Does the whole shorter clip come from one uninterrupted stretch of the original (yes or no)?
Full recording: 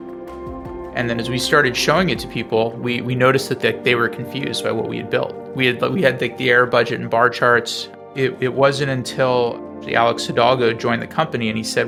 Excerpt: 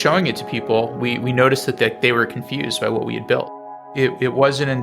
no